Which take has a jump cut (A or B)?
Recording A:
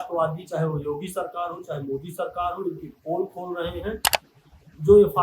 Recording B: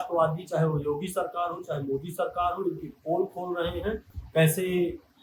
A